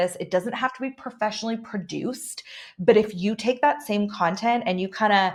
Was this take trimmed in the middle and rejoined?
no; 0 cuts

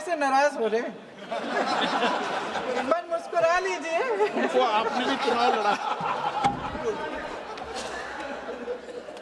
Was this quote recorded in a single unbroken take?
yes; 0 cuts

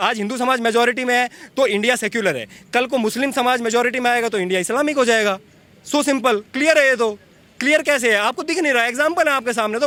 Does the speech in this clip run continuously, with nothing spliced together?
yes; 0 cuts

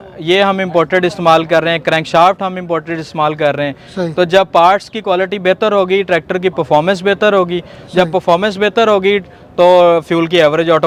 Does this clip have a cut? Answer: no; 0 cuts

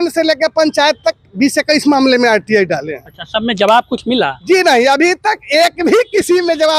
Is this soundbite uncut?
yes; 0 cuts

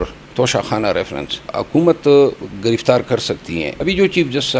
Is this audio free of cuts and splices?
no; 2 cuts; at 1.5 s, 3.7 s

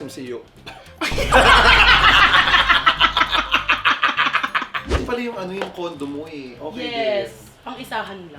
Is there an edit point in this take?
yes; 1 cut; at 4.9 s

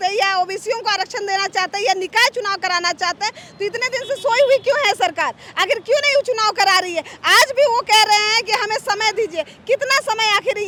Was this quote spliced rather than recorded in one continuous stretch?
no; 0 cuts

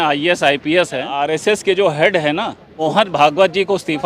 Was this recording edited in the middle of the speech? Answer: yes; 2 cuts; at 1.1 s, 2.7 s

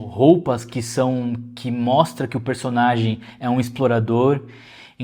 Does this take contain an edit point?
no; 0 cuts

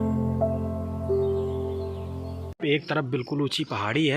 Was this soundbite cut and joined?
yes; 1 cut; at 2.6 s

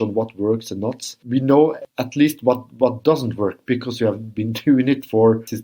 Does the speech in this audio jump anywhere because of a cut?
no; 0 cuts

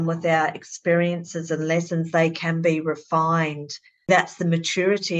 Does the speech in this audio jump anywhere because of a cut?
yes; 1 cut; at 4.1 s

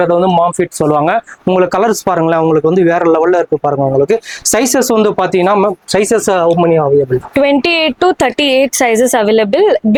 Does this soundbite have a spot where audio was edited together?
no; 0 cuts

